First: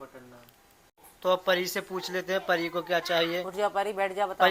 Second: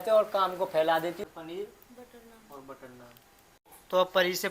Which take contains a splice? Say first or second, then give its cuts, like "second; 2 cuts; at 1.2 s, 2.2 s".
second; 1 cut; at 1.2 s